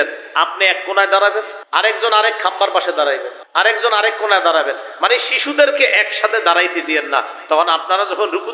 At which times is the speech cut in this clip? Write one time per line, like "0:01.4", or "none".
0:01.6
0:03.4